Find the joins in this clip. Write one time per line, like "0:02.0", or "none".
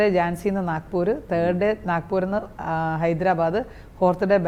none